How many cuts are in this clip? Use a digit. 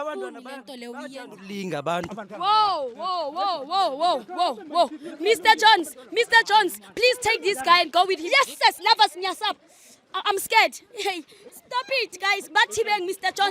1